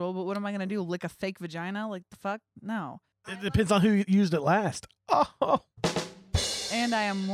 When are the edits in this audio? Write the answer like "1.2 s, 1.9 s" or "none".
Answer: 3.5 s

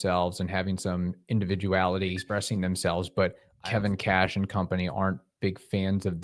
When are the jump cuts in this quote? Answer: 2.2 s, 3.5 s

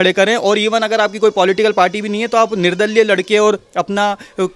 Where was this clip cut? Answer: none

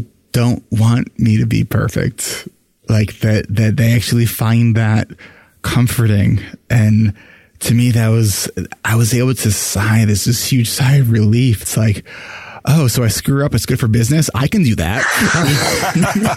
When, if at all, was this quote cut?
none

